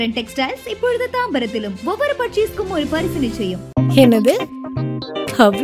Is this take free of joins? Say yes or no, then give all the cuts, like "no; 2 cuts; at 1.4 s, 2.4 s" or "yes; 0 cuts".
yes; 0 cuts